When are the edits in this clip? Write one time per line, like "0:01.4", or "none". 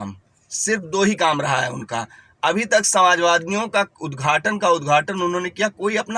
none